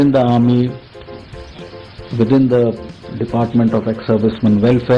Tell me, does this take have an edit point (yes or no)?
no